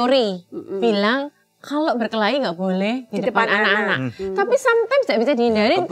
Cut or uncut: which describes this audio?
uncut